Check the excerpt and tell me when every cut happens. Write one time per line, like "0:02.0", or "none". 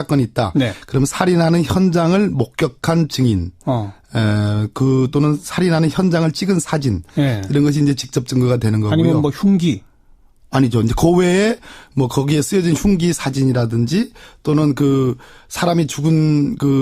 0:06.7